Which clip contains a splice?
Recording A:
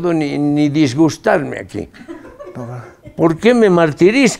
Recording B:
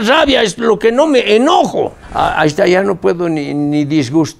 B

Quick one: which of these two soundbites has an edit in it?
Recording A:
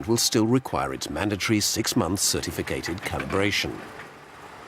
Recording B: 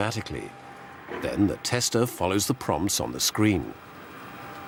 A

